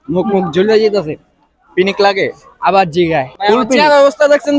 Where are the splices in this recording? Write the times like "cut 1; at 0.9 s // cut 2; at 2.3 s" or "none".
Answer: cut 1; at 3.4 s